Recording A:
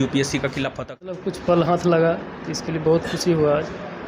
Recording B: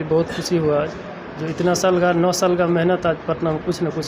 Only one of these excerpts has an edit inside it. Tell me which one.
A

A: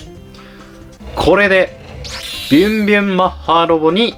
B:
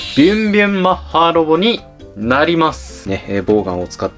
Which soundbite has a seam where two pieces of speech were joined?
B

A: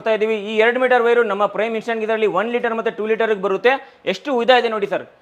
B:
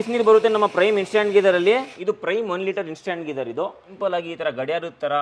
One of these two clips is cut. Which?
B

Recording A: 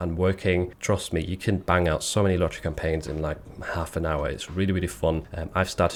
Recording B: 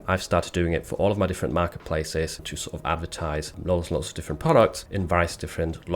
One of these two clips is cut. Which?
B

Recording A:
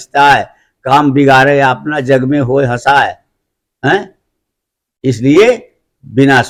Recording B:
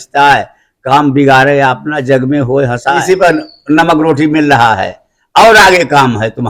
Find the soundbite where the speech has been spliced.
B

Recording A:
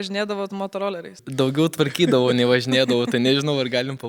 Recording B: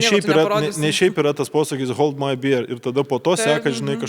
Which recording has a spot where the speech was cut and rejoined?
A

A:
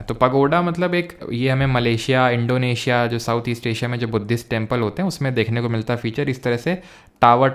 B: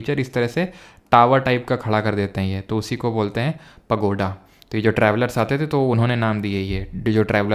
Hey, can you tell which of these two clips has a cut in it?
A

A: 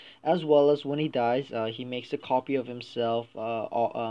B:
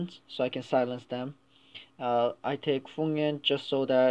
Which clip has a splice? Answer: B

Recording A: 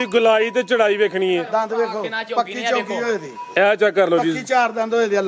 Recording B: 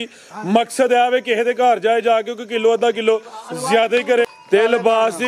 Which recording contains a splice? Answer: B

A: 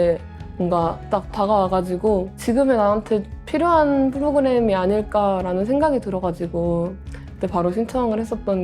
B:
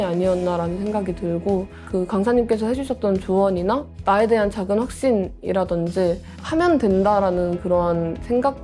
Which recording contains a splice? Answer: A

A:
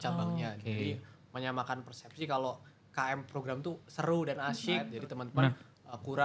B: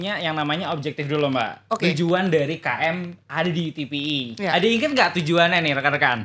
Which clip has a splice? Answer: A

